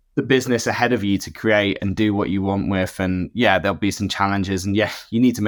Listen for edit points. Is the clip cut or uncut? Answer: uncut